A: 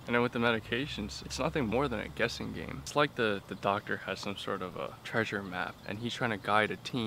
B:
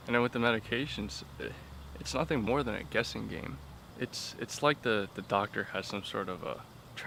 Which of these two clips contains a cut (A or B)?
A